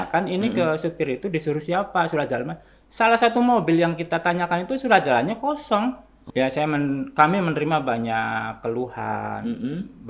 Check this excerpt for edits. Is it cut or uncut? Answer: cut